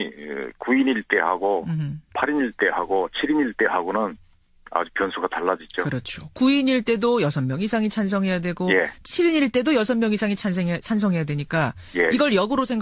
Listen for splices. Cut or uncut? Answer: uncut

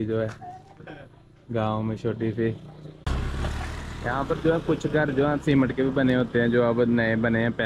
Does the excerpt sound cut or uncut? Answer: cut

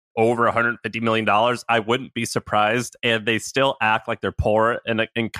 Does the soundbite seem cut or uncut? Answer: uncut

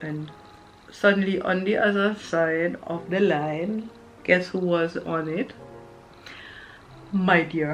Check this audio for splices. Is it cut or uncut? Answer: uncut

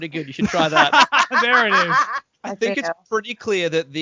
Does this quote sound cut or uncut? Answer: cut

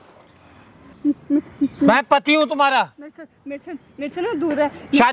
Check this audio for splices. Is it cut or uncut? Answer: cut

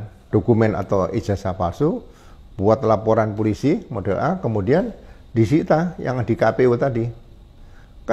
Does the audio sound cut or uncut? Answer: uncut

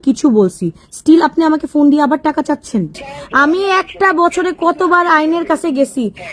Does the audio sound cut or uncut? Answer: cut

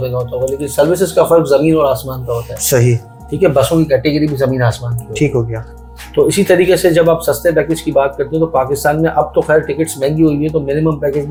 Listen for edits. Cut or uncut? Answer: uncut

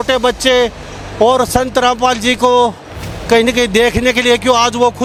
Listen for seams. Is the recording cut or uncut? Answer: uncut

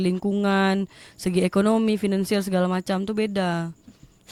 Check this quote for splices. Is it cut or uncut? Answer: uncut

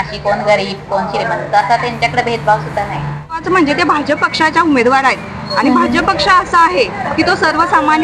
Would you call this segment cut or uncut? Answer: cut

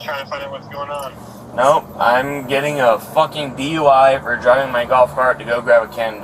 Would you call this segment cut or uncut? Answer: uncut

